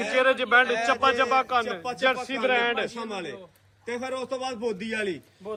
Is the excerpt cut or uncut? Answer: uncut